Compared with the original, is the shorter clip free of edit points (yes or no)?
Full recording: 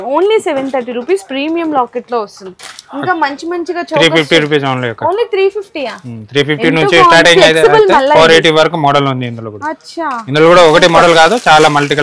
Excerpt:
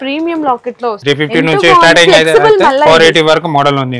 no